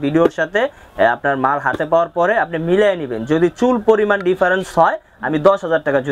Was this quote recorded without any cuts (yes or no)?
yes